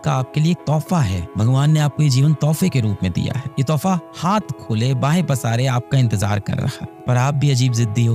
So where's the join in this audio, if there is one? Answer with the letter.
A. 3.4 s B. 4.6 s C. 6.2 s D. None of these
D